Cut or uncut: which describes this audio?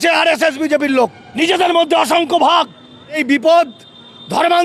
cut